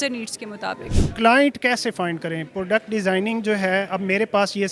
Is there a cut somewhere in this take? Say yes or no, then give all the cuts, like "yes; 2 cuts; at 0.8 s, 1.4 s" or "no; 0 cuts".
yes; 1 cut; at 0.9 s